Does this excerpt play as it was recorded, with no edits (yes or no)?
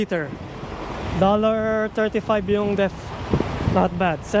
no